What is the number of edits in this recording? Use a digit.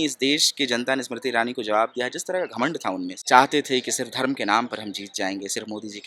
1